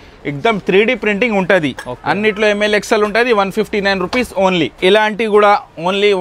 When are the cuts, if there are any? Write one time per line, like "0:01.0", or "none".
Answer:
none